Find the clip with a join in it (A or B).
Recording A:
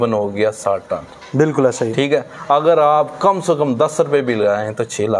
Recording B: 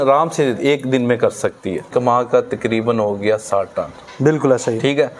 B